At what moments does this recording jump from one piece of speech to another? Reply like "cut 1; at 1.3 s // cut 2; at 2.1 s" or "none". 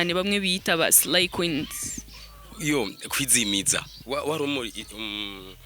cut 1; at 3.9 s